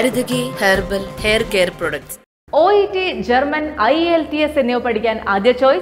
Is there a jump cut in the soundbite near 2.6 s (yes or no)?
no